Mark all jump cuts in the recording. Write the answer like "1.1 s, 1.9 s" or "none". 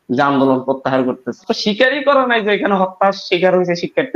1.4 s